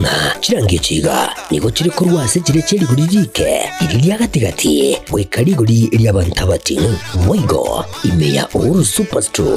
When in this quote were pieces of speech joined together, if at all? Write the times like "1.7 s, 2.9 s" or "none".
none